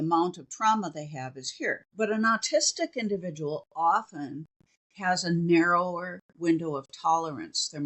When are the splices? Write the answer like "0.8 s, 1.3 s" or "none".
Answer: 1.8 s

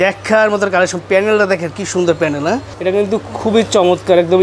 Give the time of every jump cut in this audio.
2.7 s

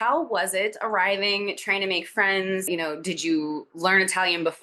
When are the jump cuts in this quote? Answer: none

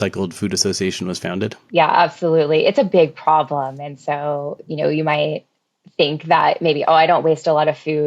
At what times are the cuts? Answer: 1.6 s

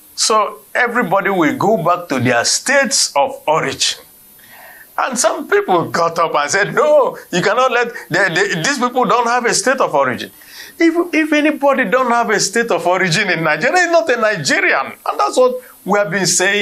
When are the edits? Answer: none

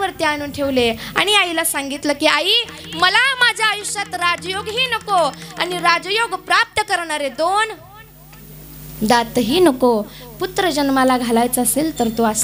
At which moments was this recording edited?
none

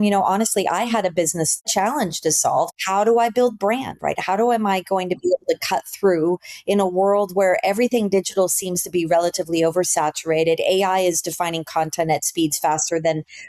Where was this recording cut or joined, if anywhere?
1.7 s, 2.7 s

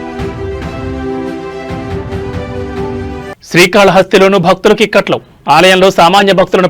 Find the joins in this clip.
3.1 s

